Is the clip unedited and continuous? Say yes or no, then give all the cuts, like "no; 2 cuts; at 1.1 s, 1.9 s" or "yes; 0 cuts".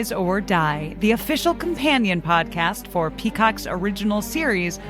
yes; 0 cuts